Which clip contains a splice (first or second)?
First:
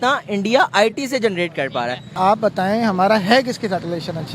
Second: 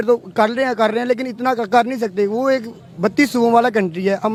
first